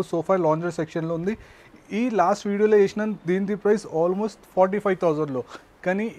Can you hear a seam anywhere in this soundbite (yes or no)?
no